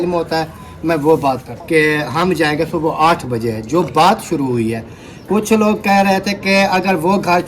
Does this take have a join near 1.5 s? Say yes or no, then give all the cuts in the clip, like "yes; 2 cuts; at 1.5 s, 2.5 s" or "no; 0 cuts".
yes; 1 cut; at 1.5 s